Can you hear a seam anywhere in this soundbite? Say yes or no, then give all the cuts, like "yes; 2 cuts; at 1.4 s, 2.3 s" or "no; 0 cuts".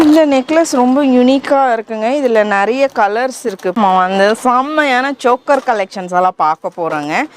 yes; 1 cut; at 3.8 s